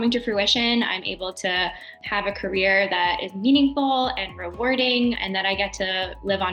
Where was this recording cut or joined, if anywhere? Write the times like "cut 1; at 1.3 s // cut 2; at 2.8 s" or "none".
cut 1; at 2.0 s // cut 2; at 5.2 s